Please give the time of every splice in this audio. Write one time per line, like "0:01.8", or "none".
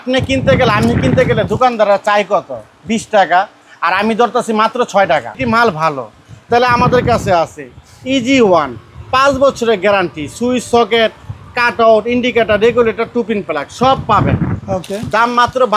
0:05.4

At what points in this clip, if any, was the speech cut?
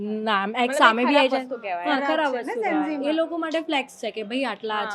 none

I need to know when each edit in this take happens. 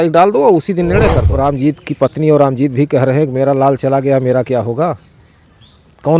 0:01.3

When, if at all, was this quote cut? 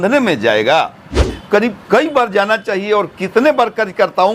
0:01.3

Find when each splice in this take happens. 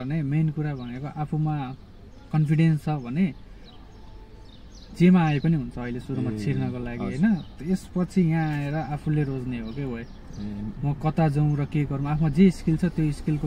none

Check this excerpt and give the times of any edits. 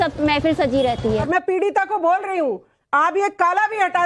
0:01.3

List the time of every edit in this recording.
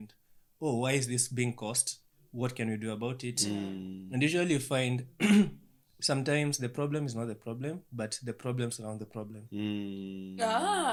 none

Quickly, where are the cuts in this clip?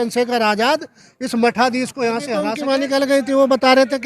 0:02.5

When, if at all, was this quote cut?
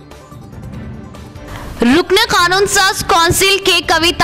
0:01.0

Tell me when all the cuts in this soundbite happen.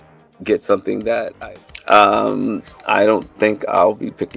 0:01.3

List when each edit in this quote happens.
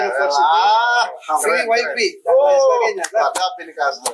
none

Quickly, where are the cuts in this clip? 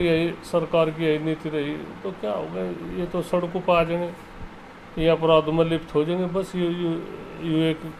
none

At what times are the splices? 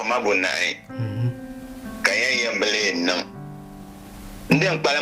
none

